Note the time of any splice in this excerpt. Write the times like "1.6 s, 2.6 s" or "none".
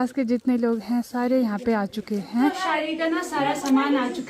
2.5 s